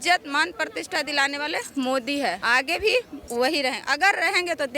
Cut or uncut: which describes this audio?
cut